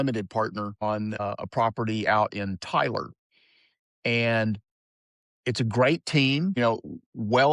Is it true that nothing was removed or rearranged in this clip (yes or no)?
no